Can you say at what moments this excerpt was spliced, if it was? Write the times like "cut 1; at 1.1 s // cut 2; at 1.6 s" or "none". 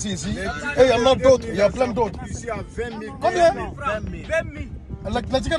none

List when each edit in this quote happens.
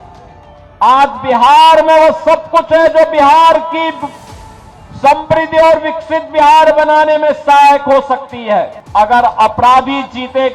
cut 1; at 8.8 s

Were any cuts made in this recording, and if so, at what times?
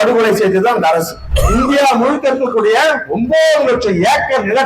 cut 1; at 1.3 s

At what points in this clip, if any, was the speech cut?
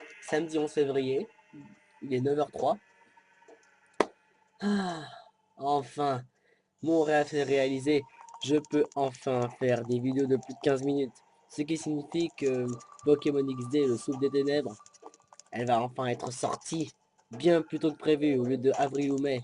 cut 1; at 8.9 s

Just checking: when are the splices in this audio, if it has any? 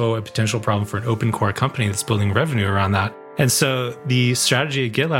cut 1; at 3.2 s

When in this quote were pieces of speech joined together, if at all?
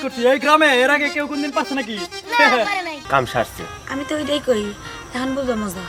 cut 1; at 3.0 s

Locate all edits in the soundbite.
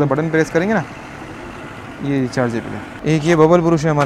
cut 1; at 2.9 s

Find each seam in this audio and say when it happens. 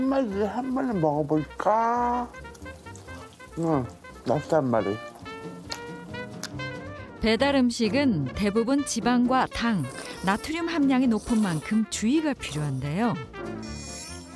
none

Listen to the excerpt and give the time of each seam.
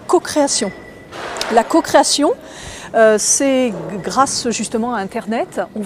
cut 1; at 1.5 s

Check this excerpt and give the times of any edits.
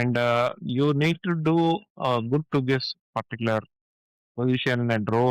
none

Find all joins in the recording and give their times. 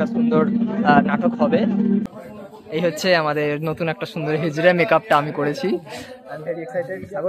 cut 1; at 2.1 s

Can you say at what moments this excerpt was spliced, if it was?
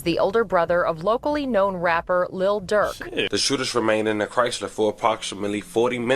cut 1; at 3.3 s

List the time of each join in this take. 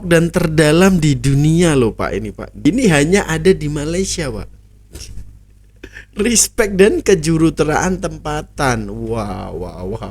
cut 1; at 2.4 s

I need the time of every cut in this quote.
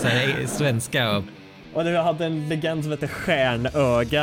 cut 1; at 1.3 s

